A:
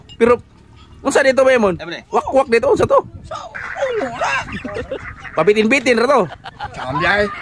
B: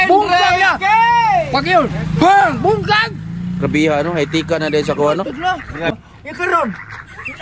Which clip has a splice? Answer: B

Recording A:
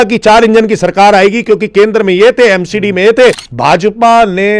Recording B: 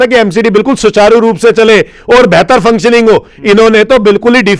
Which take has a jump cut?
A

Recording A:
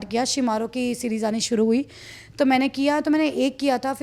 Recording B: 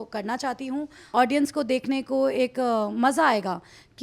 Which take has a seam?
B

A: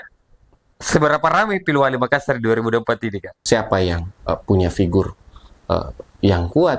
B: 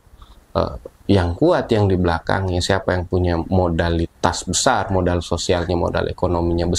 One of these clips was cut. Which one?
A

